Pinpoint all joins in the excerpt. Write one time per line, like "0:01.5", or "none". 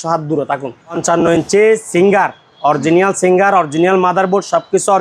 0:01.0